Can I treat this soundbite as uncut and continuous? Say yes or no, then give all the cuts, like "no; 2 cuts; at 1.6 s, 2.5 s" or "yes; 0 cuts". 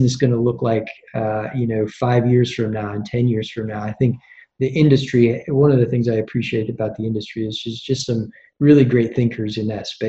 yes; 0 cuts